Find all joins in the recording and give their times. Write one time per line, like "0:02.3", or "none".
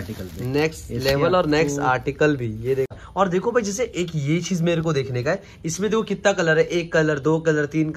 0:02.9